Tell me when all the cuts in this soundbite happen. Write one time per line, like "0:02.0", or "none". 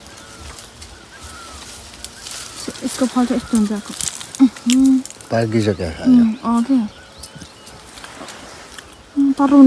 none